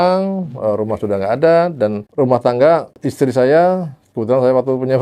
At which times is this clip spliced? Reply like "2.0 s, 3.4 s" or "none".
2.0 s, 3.0 s